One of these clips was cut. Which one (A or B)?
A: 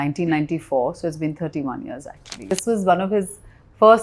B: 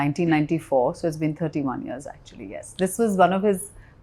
A